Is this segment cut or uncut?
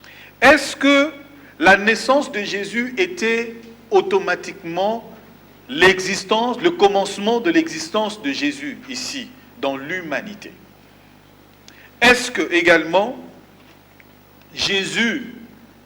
uncut